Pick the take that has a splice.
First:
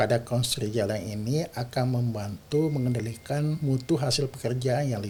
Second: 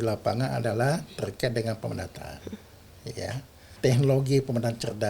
second; 1 cut; at 3.7 s

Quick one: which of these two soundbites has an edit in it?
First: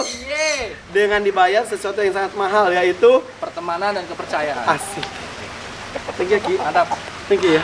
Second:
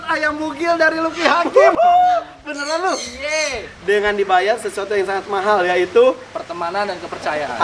second; 1 cut; at 1.5 s

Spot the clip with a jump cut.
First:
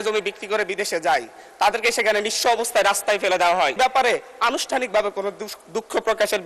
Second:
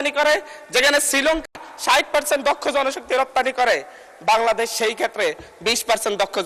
first; 1 cut; at 3.8 s

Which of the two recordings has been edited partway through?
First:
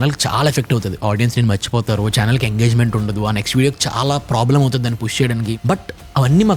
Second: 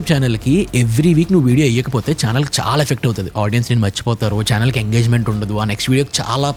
first; 1 cut; at 5.6 s

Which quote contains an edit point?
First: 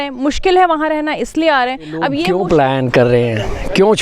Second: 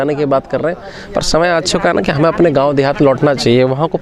first; 1 cut; at 2.2 s

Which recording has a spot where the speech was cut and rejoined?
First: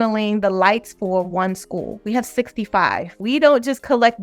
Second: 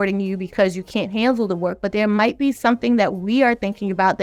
first; 2 cuts; at 2.0 s, 3.1 s

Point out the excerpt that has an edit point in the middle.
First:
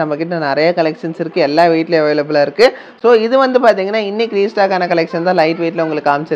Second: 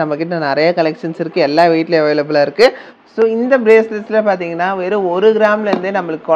second; 1 cut; at 2.9 s

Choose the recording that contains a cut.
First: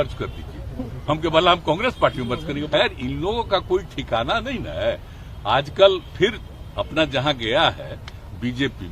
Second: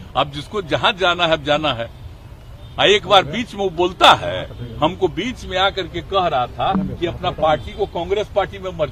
first; 1 cut; at 2.6 s

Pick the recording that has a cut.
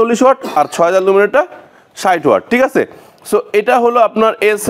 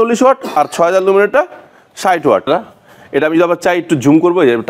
second; 1 cut; at 2.5 s

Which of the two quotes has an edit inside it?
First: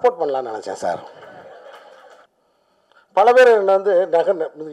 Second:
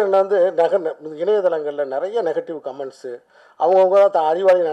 first; 1 cut; at 2.3 s

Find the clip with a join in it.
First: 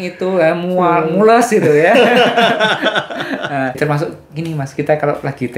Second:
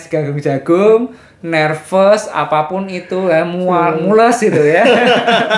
first; 1 cut; at 3.8 s

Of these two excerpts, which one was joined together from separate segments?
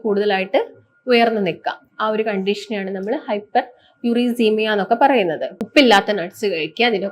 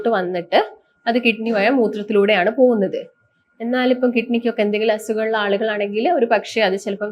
first; 1 cut; at 5.5 s

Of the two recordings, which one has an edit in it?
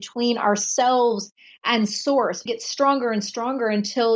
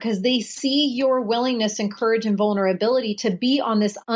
first; 1 cut; at 2.4 s

